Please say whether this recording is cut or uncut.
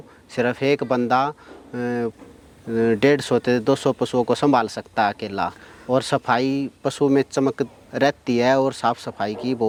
uncut